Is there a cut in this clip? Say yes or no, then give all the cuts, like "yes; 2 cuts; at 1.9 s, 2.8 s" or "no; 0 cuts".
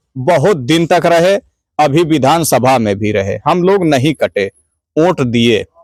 no; 0 cuts